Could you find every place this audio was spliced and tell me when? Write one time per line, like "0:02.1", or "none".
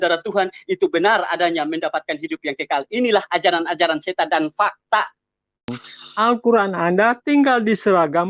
0:05.8